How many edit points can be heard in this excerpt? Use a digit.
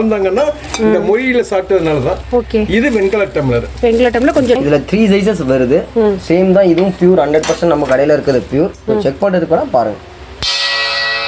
1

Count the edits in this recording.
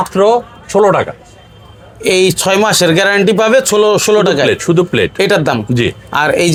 0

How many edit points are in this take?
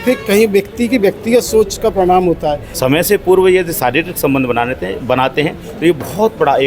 1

